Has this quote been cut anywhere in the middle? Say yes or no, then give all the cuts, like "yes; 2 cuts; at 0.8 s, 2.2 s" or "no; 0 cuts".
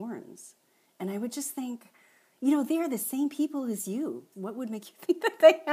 yes; 1 cut; at 4.3 s